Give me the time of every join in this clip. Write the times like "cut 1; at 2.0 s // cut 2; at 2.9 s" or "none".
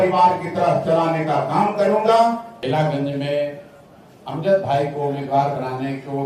cut 1; at 2.5 s